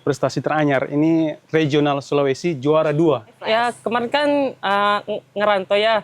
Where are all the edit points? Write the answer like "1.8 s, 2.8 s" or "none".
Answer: 3.3 s